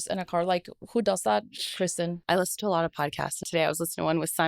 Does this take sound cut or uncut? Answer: cut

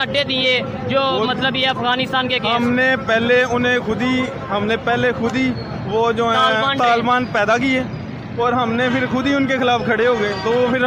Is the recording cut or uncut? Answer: uncut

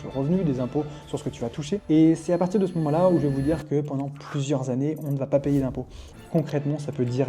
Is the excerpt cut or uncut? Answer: cut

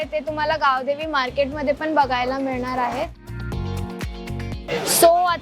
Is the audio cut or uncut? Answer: uncut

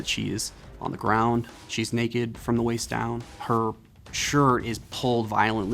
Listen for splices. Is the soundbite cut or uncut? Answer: cut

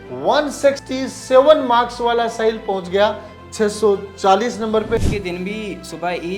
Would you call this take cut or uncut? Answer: cut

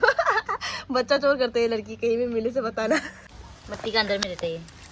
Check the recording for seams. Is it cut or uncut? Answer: cut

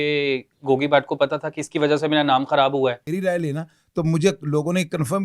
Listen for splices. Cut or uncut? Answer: cut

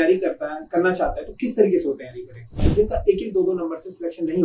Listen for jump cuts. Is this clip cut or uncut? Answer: cut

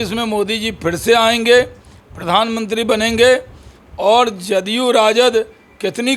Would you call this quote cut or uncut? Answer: uncut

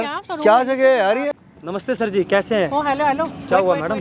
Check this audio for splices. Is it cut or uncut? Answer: cut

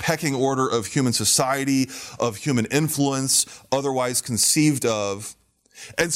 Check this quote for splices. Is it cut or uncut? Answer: uncut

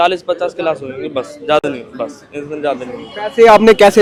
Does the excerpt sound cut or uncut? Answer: uncut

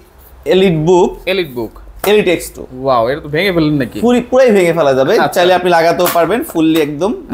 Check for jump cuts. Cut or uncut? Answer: uncut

